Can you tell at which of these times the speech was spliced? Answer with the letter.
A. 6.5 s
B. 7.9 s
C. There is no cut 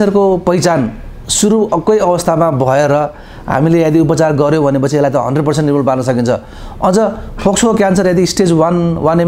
C